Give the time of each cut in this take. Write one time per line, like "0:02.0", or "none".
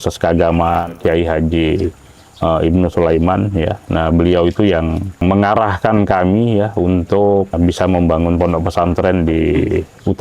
0:00.9
0:05.2
0:07.5